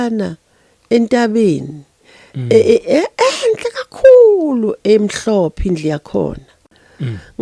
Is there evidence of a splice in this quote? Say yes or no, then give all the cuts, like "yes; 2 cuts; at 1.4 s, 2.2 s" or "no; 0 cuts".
no; 0 cuts